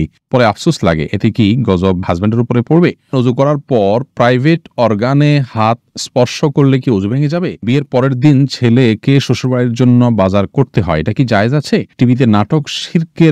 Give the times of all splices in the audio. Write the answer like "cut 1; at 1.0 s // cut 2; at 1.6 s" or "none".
cut 1; at 3.1 s // cut 2; at 7.6 s // cut 3; at 11.9 s